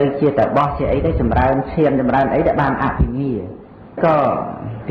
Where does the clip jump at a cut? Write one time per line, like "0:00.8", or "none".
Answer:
0:04.0